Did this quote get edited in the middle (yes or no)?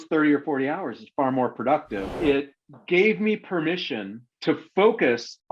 yes